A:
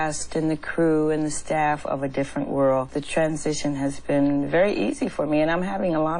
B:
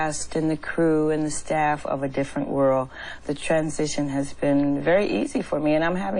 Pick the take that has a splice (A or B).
A